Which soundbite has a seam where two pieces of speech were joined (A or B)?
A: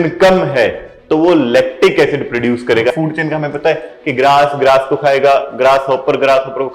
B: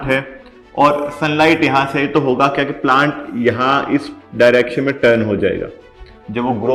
A